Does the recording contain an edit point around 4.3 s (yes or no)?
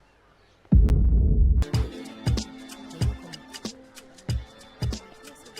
no